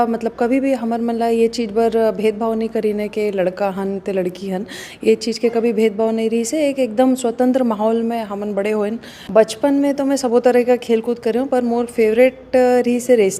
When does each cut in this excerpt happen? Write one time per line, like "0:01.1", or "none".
0:09.1